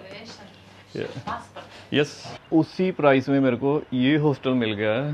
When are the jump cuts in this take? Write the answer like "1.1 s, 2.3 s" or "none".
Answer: 2.4 s

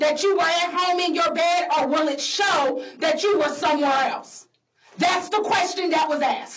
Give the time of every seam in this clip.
none

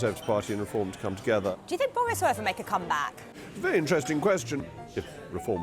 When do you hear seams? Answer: 1.5 s, 4.6 s

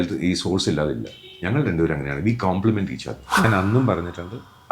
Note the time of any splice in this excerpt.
3.5 s

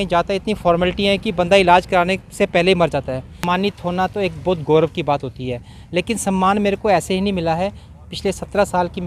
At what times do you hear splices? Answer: 3.3 s

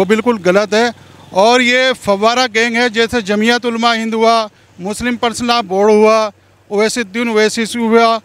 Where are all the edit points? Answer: none

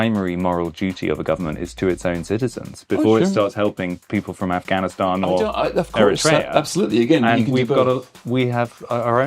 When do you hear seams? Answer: none

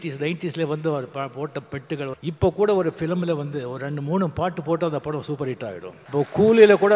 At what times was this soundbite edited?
2.2 s, 5.9 s

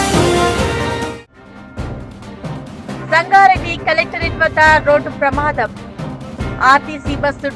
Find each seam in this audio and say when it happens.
1.2 s

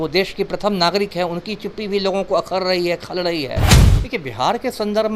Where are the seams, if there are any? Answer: 3.8 s

